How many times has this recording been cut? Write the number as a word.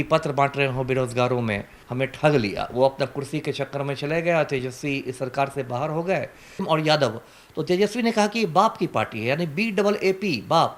two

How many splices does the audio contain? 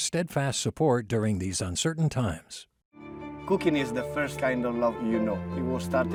zero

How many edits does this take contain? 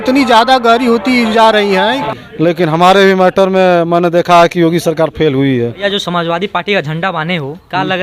two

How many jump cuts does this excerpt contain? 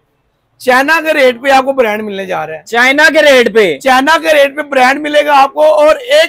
zero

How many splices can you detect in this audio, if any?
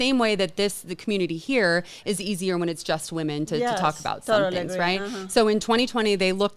zero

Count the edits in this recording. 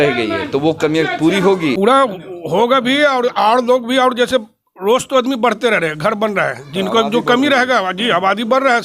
one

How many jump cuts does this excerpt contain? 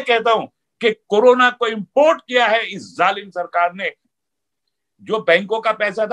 one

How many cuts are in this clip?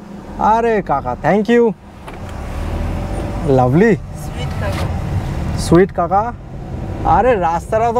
zero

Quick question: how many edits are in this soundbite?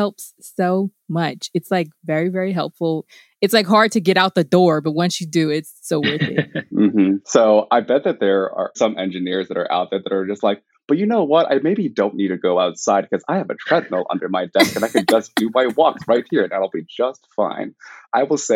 one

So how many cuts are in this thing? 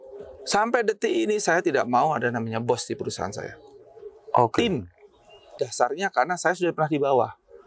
one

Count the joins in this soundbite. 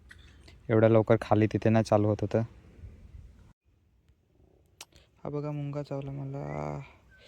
one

